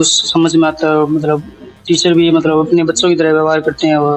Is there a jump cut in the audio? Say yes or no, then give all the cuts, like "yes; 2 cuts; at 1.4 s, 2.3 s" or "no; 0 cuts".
no; 0 cuts